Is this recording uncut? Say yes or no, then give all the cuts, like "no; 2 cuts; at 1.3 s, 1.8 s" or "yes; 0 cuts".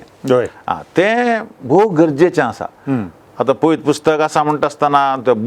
yes; 0 cuts